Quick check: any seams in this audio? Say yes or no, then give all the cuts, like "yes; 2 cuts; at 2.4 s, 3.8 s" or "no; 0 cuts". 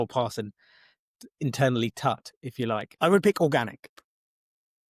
yes; 1 cut; at 2.9 s